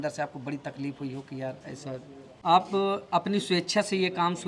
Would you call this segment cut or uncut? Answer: cut